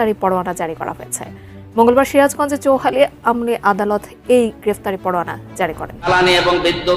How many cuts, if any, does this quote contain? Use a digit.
1